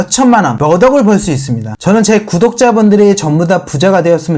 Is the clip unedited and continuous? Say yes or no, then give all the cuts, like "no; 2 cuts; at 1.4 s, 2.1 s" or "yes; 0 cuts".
yes; 0 cuts